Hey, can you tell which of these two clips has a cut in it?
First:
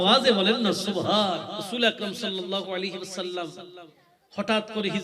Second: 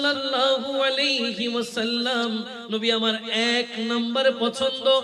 first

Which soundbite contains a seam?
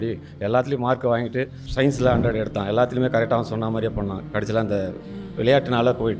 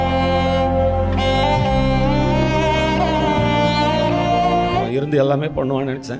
first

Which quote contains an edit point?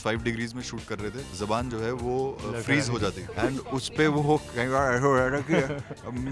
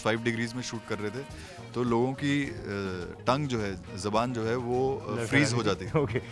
first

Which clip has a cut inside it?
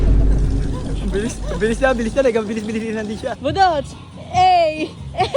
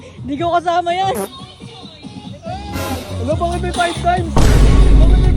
first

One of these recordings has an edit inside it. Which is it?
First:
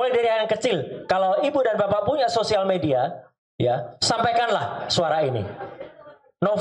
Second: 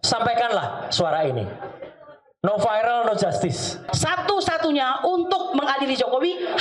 second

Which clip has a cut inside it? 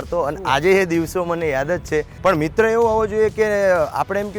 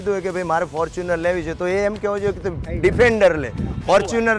first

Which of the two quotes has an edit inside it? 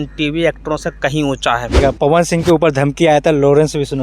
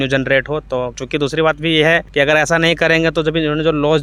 first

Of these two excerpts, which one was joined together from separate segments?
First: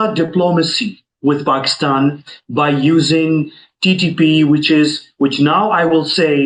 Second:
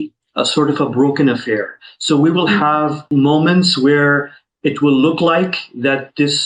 second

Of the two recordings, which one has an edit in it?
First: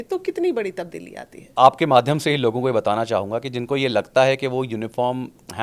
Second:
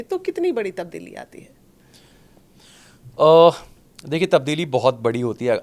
first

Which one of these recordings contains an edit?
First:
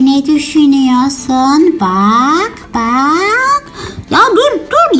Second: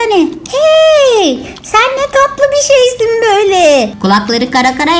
second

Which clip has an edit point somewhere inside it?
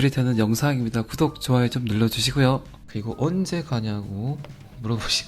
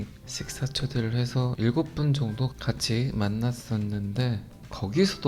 first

